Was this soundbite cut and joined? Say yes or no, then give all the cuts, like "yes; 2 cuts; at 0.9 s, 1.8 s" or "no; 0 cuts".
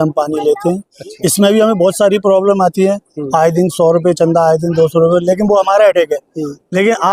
no; 0 cuts